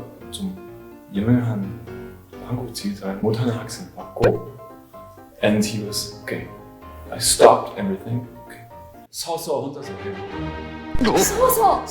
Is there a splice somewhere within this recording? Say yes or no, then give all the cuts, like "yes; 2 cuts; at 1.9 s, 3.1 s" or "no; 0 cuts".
yes; 1 cut; at 3.2 s